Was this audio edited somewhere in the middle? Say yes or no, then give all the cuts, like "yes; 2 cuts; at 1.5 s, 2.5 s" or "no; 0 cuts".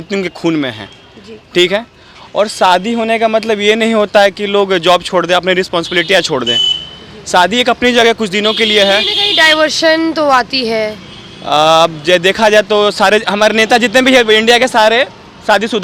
no; 0 cuts